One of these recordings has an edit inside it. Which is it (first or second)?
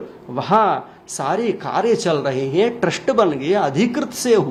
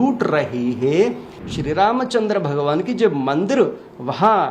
second